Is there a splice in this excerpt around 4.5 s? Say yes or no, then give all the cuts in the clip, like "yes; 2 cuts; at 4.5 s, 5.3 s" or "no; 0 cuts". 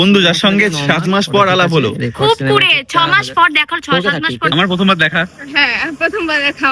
yes; 1 cut; at 4.5 s